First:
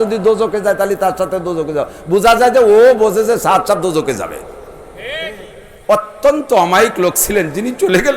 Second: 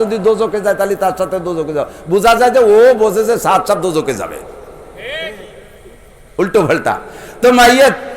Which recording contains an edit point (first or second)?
first